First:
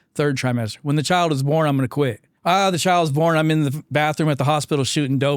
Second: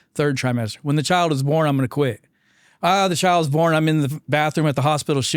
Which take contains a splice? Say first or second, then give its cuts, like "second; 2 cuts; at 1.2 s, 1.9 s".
first; 1 cut; at 2.3 s